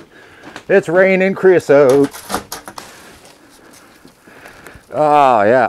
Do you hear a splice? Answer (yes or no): yes